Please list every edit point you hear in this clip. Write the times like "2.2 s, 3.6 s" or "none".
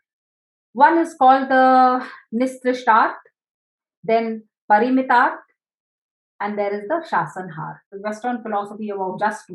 7.9 s